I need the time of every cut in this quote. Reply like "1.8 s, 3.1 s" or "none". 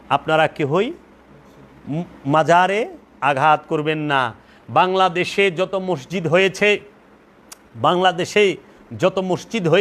none